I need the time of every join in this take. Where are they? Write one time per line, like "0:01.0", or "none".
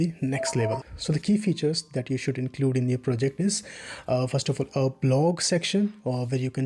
none